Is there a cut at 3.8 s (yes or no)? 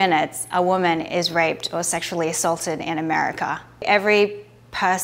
yes